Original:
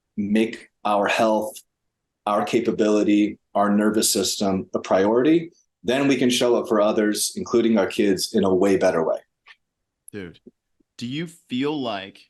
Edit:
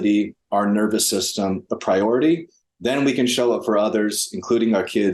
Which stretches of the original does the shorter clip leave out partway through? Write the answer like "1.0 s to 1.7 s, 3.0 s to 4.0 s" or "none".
none